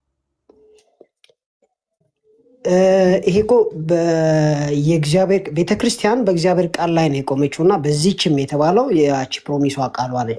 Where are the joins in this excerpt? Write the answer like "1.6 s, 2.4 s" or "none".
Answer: none